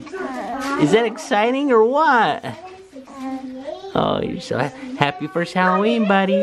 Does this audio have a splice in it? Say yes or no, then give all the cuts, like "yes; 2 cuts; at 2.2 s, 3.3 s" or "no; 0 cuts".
no; 0 cuts